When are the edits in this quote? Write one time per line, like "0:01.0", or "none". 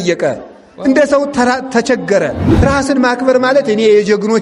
0:02.4